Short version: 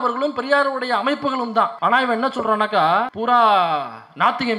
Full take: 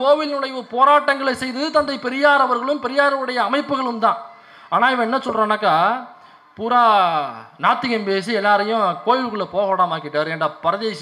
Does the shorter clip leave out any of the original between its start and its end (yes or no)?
yes